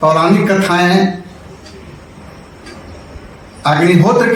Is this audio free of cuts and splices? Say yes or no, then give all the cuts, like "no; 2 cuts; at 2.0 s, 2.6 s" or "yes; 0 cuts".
yes; 0 cuts